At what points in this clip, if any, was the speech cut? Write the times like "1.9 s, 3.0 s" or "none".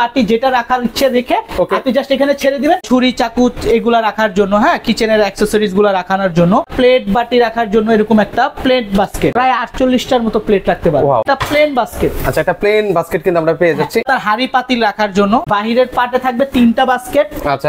2.8 s, 6.7 s, 9.3 s, 11.2 s, 14.1 s, 15.5 s